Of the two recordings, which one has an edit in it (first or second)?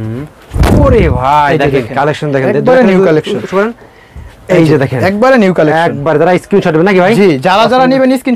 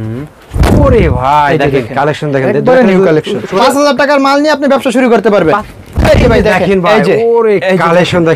second